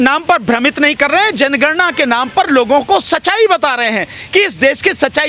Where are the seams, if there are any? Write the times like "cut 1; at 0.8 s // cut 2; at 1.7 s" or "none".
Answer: none